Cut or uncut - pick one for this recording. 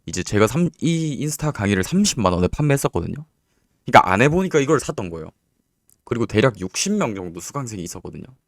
uncut